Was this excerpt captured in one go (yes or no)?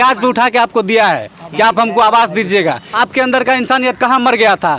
no